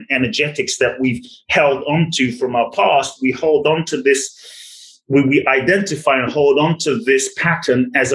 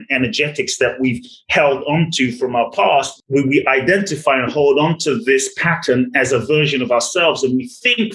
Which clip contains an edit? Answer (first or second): second